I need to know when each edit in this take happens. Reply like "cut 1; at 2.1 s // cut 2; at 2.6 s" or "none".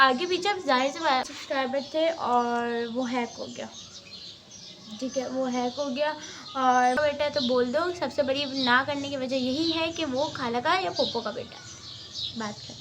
cut 1; at 1.3 s // cut 2; at 7.0 s